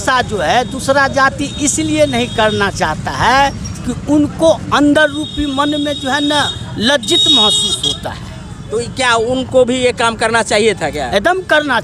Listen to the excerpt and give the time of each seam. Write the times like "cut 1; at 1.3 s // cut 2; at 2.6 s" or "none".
none